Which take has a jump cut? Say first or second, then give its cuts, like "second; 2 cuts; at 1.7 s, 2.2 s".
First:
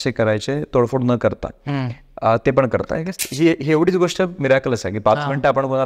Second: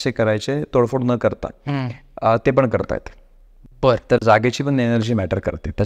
first; 1 cut; at 3.2 s